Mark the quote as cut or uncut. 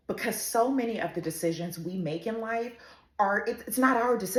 uncut